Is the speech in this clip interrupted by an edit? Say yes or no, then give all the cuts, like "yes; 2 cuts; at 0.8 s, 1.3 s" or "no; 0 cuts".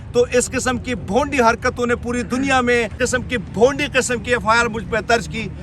yes; 1 cut; at 2.9 s